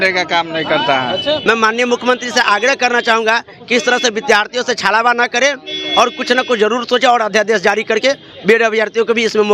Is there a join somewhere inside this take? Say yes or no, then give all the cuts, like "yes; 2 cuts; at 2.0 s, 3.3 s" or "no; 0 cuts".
yes; 1 cut; at 1.4 s